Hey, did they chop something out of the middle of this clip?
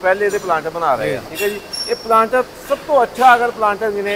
yes; 1 cut; at 1.2 s

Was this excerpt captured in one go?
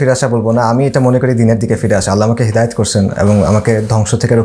yes; 0 cuts

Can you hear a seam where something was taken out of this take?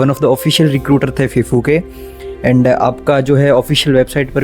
no; 0 cuts

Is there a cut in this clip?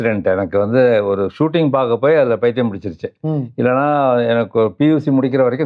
no; 0 cuts

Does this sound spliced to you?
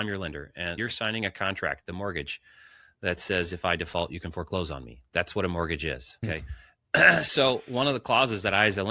yes; 2 cuts; at 0.8 s, 6.2 s

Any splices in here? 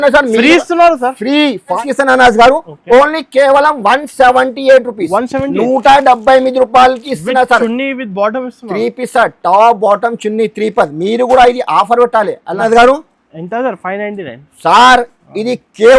yes; 2 cuts; at 1.8 s, 12.6 s

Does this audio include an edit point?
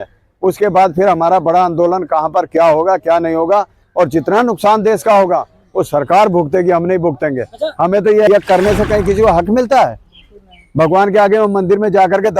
yes; 1 cut; at 8.3 s

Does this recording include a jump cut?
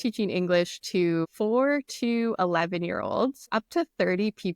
yes; 2 cuts; at 1.3 s, 3.4 s

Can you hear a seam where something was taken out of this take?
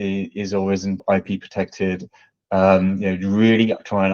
yes; 1 cut; at 1.0 s

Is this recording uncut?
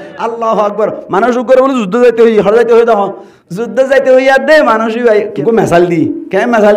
no; 1 cut; at 5.3 s

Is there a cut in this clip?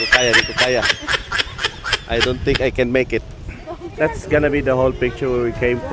yes; 1 cut; at 3.8 s

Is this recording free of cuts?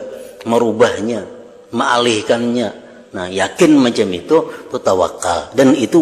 yes; 0 cuts

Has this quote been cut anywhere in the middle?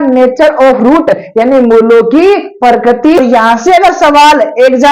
yes; 1 cut; at 3.2 s

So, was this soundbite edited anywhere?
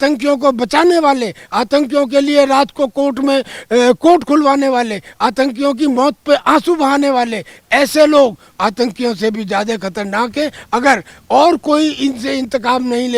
no; 0 cuts

